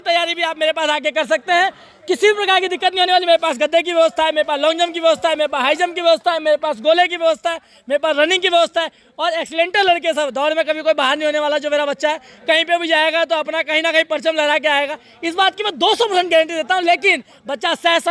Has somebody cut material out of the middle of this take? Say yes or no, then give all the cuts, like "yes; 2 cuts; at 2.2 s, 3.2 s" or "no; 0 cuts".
no; 0 cuts